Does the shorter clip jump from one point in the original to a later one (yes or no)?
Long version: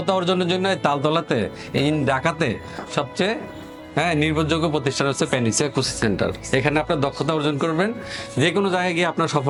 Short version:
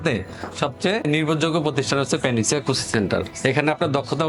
yes